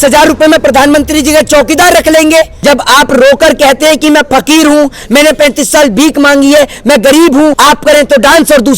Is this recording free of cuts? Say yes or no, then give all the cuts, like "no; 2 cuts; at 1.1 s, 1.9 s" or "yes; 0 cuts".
no; 2 cuts; at 2.5 s, 7.6 s